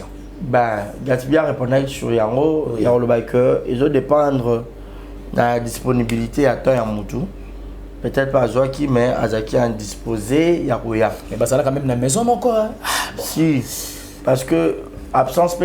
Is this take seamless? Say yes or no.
yes